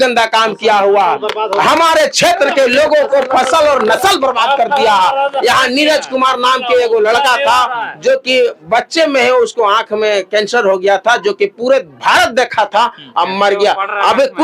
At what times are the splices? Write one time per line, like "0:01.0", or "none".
none